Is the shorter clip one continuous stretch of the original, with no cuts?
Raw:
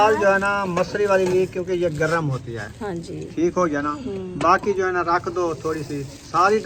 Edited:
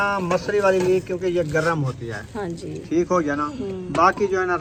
yes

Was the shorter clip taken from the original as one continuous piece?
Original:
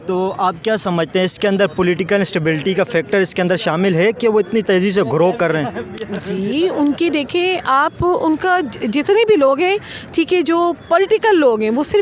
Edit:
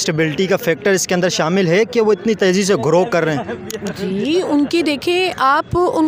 yes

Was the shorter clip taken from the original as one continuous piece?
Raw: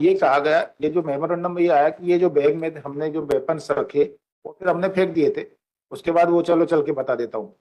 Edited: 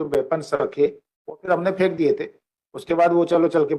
yes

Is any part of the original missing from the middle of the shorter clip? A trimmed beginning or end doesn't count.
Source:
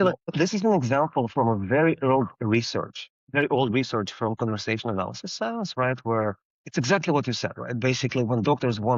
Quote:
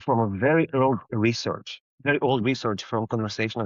no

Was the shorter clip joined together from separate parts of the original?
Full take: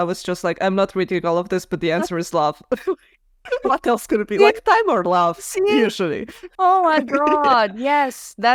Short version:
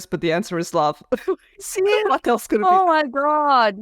yes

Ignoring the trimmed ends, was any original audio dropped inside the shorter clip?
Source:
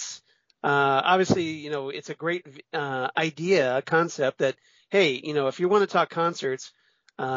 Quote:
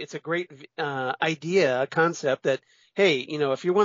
no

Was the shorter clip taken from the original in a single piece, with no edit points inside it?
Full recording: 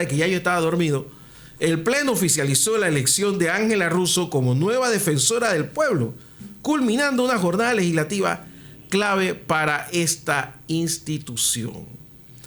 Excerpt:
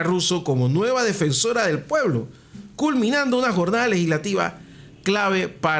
yes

